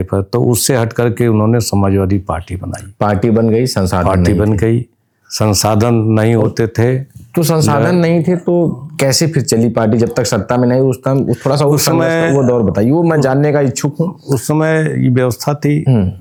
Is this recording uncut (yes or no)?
yes